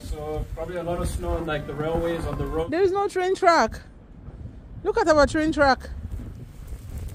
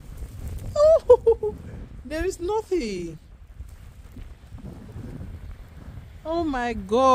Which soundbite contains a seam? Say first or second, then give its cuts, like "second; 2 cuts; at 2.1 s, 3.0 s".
first; 1 cut; at 2.6 s